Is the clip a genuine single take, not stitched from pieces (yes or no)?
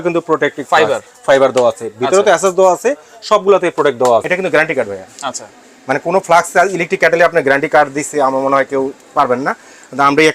no